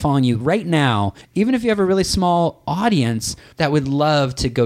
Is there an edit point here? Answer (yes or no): yes